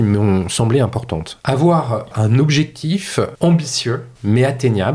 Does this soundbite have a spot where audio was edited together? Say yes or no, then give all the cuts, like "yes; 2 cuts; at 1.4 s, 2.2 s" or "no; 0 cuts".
yes; 4 cuts; at 1.3 s, 2.1 s, 3.3 s, 4.1 s